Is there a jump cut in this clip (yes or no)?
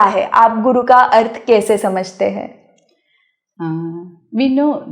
no